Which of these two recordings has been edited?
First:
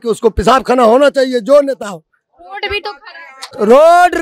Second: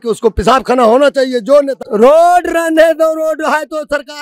second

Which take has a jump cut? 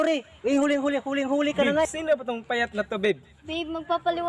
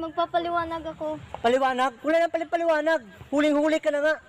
first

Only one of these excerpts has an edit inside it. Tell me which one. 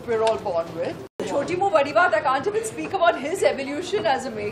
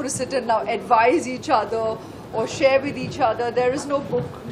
first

